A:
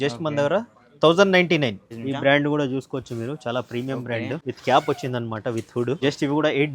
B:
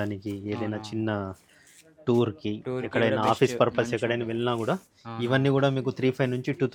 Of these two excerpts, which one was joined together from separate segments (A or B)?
A